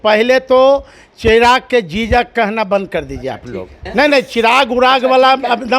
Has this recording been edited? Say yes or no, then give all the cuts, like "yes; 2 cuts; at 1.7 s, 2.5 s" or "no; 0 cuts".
yes; 1 cut; at 3.8 s